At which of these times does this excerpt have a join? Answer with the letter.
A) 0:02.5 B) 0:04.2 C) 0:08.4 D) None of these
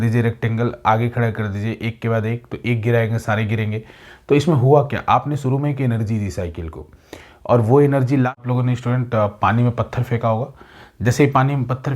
C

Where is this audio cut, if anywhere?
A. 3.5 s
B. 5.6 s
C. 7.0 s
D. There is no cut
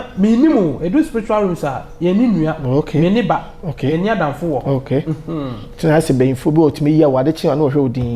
D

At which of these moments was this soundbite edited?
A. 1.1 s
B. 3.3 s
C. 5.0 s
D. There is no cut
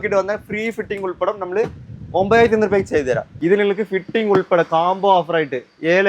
B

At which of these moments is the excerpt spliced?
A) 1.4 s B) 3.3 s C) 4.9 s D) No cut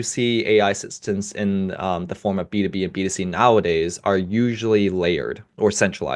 D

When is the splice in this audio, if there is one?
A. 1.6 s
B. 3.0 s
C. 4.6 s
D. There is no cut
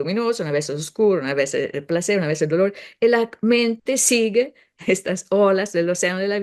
D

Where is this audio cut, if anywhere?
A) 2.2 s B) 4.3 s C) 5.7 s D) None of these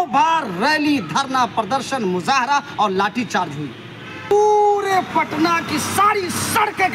B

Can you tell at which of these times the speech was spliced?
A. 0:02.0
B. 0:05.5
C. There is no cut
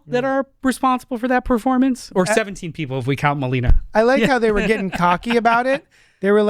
A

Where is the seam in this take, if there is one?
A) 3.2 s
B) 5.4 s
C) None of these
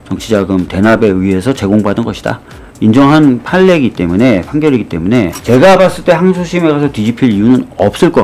B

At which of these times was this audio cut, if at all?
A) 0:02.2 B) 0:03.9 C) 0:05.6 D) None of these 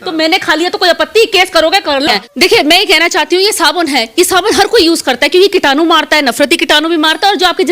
A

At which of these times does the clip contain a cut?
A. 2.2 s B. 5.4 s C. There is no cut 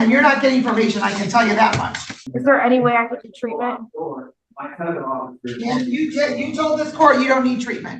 A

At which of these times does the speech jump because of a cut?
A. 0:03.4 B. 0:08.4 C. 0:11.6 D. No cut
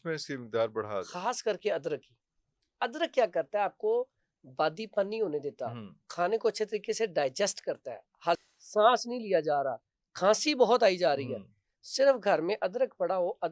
B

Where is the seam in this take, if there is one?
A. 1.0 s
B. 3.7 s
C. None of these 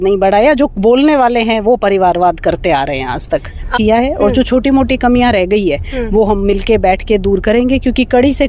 B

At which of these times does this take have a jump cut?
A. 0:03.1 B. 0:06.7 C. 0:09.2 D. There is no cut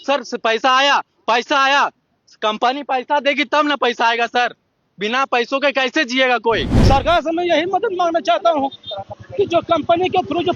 B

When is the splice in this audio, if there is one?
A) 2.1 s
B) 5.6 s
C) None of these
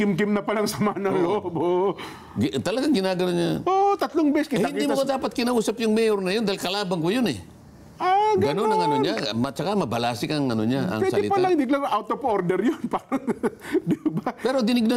C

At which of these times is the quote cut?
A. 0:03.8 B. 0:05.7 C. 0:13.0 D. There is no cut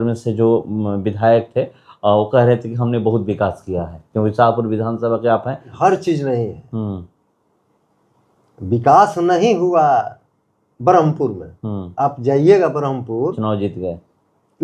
B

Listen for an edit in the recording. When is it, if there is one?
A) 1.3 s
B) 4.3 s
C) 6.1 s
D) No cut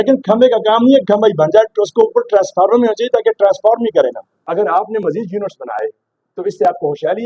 B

